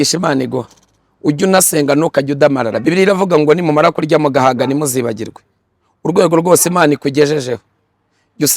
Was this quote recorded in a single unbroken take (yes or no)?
no